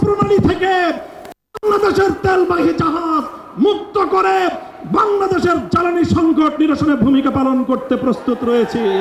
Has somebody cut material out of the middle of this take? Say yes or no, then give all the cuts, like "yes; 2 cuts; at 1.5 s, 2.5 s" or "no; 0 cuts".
no; 0 cuts